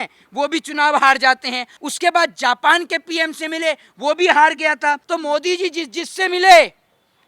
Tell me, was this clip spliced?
yes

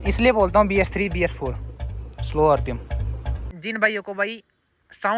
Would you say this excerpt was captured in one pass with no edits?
no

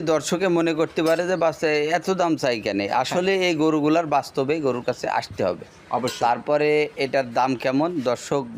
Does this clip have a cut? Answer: no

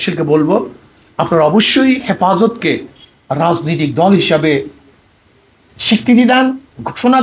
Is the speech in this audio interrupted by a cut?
no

